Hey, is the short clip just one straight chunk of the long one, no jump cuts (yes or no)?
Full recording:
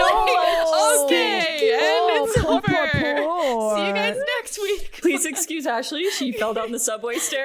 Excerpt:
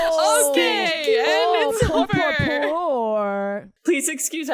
no